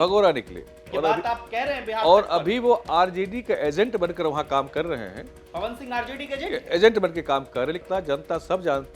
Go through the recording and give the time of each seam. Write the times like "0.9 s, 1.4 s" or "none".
7.8 s

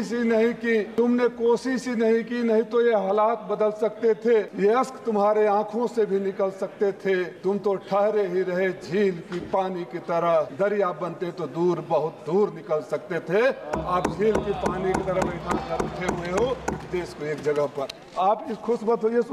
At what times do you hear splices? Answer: 0.9 s, 4.5 s, 7.3 s, 10.5 s, 18.0 s

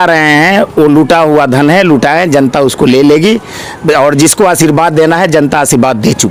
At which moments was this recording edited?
none

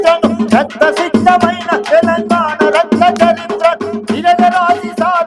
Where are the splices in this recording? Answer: none

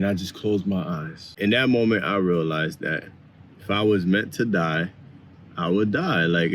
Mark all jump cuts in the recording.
1.3 s

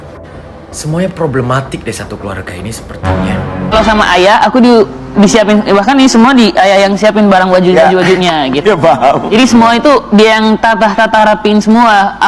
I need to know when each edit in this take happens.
3.7 s

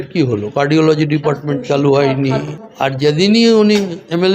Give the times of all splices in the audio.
2.6 s

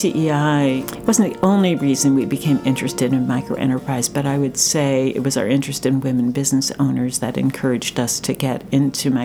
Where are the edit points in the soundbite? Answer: 0.9 s

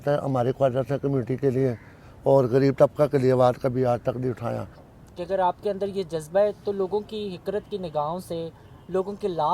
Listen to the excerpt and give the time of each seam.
4.9 s

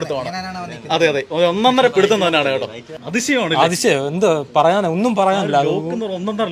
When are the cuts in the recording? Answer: 2.9 s

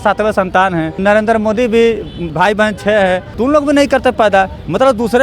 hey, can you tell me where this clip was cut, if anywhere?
1.0 s, 2.3 s, 3.3 s

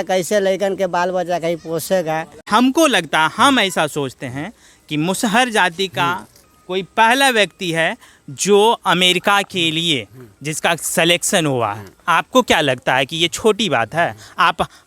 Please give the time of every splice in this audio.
2.4 s

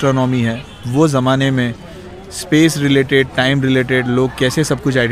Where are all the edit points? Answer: none

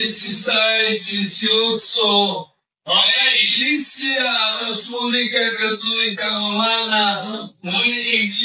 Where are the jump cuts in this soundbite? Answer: 6.4 s

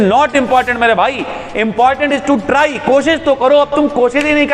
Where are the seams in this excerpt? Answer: none

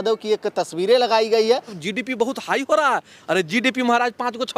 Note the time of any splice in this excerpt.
1.8 s

